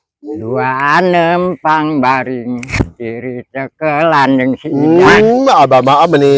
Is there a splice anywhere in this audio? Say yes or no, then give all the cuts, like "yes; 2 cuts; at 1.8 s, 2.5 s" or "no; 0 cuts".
no; 0 cuts